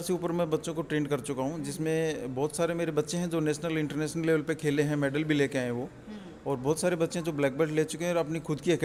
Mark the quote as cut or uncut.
uncut